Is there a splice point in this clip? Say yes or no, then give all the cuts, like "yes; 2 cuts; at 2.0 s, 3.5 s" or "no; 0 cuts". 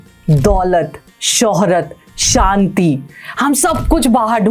no; 0 cuts